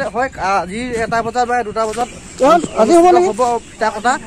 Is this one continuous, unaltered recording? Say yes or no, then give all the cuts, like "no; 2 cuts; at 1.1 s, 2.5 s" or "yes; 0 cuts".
no; 1 cut; at 2.2 s